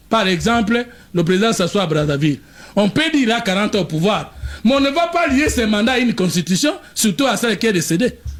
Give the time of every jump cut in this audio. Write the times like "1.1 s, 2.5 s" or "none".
none